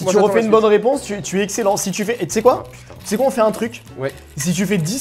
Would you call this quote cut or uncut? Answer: uncut